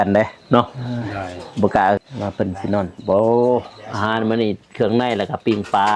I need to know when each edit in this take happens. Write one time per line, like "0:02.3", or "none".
0:02.0

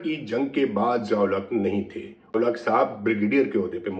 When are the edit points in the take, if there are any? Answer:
0:02.4

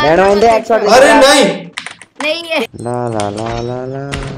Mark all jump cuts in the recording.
0:02.8

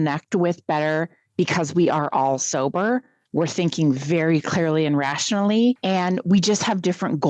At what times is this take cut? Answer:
0:05.8

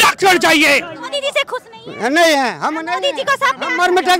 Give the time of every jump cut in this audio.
0:01.0

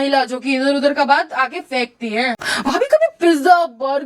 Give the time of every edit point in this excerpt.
0:02.3

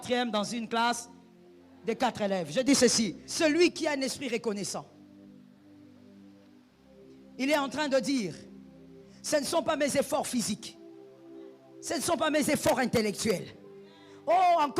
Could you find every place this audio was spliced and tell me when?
0:03.2

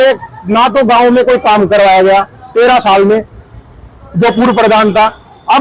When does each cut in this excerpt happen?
none

